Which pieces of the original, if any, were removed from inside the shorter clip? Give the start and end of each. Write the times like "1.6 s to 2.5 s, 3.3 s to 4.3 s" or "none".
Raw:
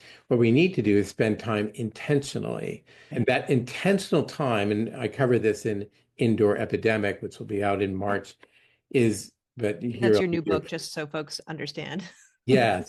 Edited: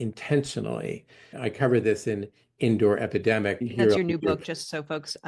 3.1 s to 4.9 s, 7.2 s to 9.9 s